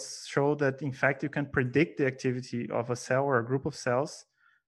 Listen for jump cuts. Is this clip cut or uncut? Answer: uncut